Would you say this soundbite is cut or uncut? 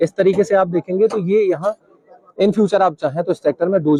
uncut